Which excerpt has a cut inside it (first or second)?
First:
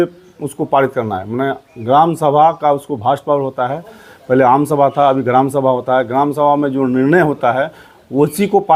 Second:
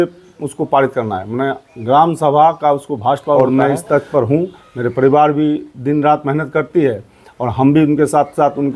second